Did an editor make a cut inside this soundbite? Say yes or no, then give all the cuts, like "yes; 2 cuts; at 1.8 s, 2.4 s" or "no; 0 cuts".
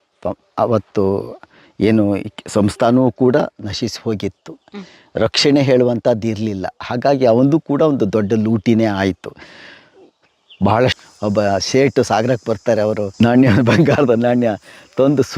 yes; 2 cuts; at 11.0 s, 13.1 s